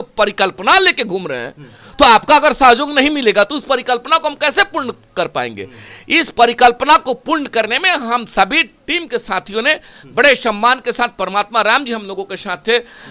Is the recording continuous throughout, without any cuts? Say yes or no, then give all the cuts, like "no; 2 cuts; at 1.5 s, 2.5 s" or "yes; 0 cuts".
yes; 0 cuts